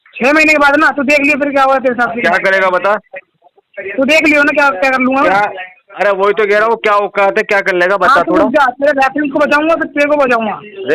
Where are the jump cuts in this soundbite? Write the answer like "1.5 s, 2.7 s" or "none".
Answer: none